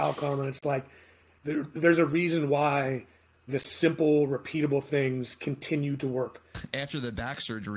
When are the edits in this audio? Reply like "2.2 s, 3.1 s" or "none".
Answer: 6.5 s